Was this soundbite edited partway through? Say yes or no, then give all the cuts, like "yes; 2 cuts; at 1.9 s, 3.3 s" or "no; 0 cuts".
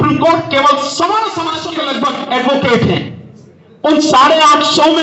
yes; 1 cut; at 1.7 s